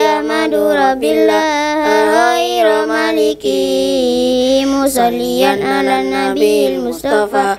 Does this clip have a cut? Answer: no; 0 cuts

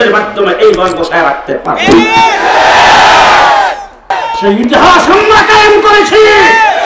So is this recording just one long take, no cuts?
no; 1 cut; at 4.1 s

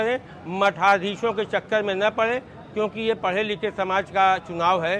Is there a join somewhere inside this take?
no; 0 cuts

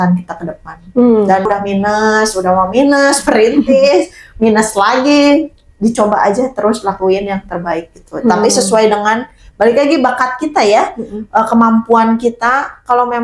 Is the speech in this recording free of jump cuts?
no; 1 cut; at 1.5 s

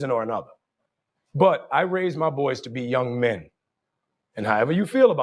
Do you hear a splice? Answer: no; 0 cuts

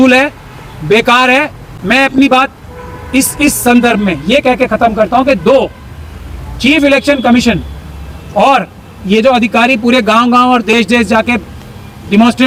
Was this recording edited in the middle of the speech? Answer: no; 0 cuts

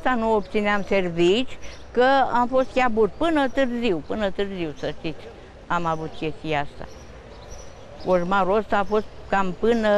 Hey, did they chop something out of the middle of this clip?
no; 0 cuts

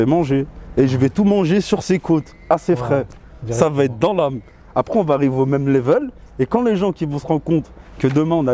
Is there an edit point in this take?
no; 0 cuts

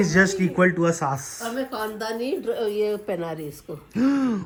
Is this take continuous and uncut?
yes; 0 cuts

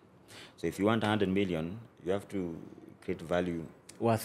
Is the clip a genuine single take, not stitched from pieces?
yes; 0 cuts

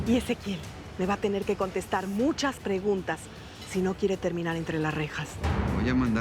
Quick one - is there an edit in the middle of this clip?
yes; 1 cut; at 5.3 s

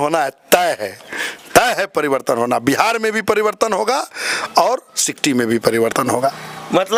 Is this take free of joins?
yes; 0 cuts

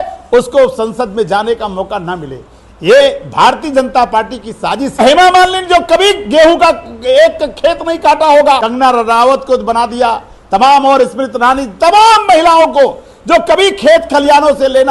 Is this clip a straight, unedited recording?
no; 2 cuts; at 5.0 s, 8.7 s

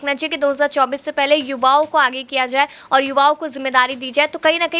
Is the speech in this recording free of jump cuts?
yes; 0 cuts

